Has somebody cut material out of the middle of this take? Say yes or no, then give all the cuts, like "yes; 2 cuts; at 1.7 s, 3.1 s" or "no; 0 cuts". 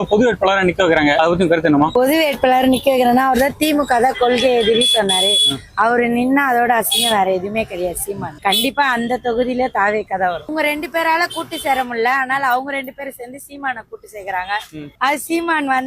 yes; 3 cuts; at 1.2 s, 8.4 s, 10.5 s